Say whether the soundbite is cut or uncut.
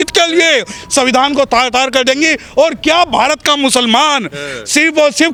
uncut